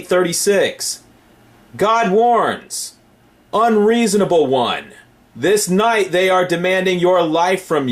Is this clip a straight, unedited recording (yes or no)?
yes